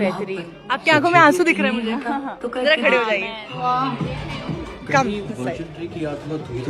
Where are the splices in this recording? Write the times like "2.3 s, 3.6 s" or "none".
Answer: none